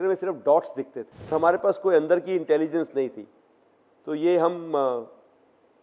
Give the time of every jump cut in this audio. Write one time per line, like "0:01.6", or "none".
0:01.3